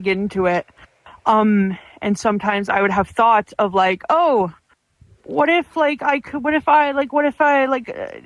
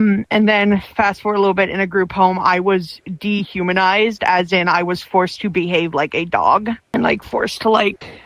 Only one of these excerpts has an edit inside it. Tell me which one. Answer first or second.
second